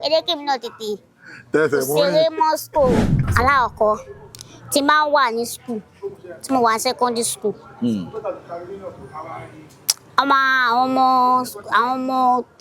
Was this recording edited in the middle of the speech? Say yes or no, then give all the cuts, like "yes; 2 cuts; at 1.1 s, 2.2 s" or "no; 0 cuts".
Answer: yes; 1 cut; at 3.2 s